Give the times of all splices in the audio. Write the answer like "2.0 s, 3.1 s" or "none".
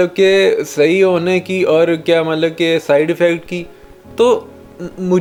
none